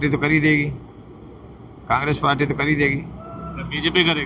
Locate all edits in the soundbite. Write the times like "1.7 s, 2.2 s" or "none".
none

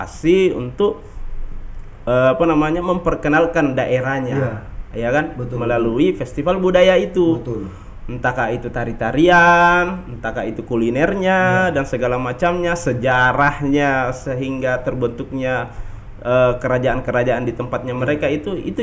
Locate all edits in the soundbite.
none

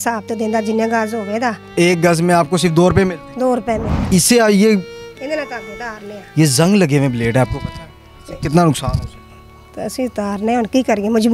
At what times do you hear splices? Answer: 1.6 s, 3.9 s

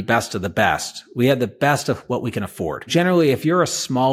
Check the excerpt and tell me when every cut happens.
2.9 s

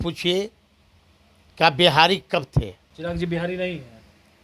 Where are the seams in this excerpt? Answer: 2.8 s

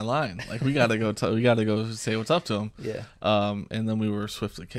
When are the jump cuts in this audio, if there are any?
none

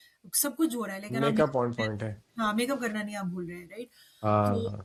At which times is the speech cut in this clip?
none

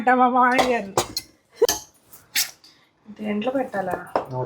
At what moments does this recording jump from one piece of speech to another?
1.7 s

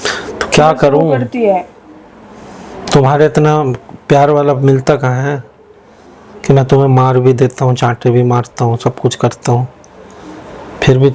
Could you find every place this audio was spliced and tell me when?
none

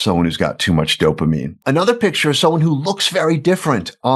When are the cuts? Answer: 1.6 s

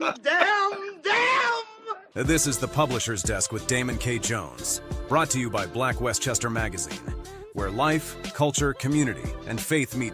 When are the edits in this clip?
2.2 s

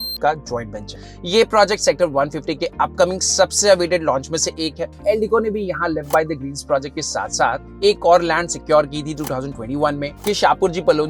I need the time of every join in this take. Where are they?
4.9 s, 10.2 s

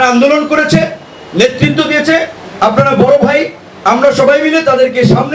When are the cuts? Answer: none

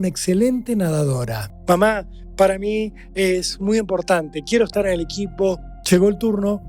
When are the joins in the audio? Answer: 1.4 s, 5.7 s

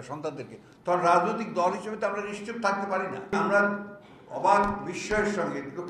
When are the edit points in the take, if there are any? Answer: 3.3 s

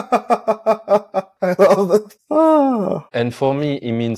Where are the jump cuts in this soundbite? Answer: 1.3 s, 3.1 s

